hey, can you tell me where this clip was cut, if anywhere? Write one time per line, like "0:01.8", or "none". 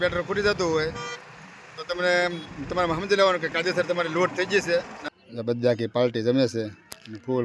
0:05.0